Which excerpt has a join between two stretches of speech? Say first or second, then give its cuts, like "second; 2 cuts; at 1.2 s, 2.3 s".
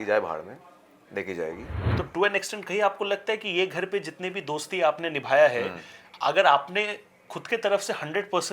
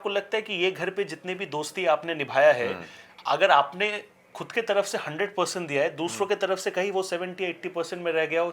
first; 1 cut; at 1.8 s